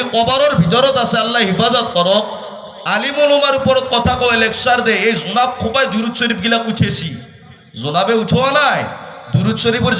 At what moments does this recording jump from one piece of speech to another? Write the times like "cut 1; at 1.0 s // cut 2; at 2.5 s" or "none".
none